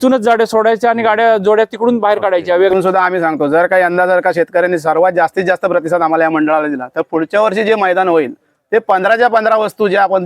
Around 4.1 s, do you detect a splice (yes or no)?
no